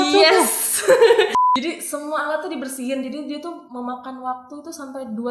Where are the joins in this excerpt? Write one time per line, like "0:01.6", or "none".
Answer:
0:01.3